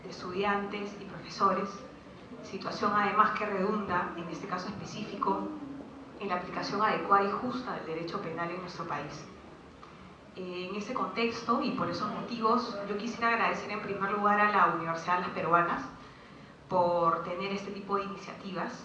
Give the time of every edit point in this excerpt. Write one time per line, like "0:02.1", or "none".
0:16.0

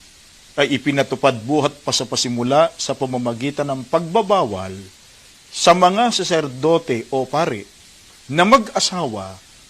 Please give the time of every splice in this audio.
none

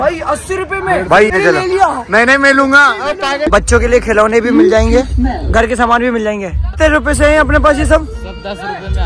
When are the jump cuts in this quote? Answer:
0:01.3
0:03.4
0:06.7

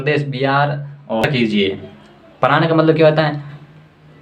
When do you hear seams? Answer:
0:01.2

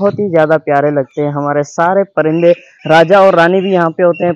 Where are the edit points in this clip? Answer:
none

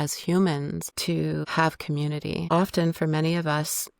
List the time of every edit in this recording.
0:01.4
0:02.4

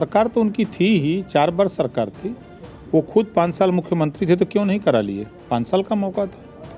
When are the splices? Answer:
none

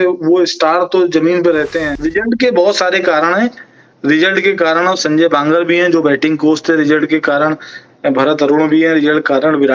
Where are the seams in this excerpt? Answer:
0:01.9

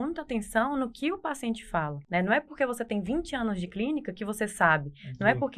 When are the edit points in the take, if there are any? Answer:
0:02.0

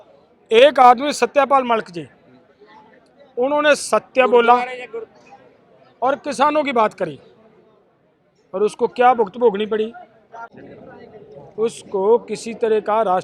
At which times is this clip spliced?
none

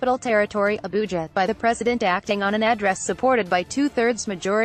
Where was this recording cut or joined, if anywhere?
0:00.9

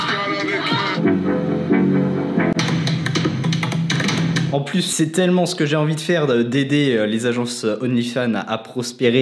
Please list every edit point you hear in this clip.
0:01.0
0:04.7

